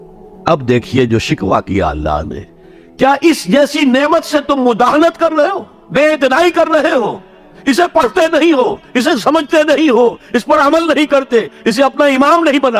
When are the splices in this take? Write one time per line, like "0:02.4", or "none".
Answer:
none

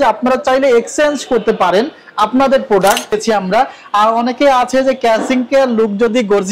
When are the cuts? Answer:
0:03.2

